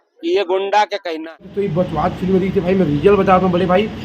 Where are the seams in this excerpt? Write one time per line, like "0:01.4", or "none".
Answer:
0:01.5